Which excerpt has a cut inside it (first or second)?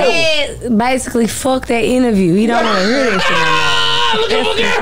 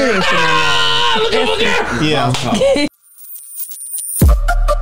second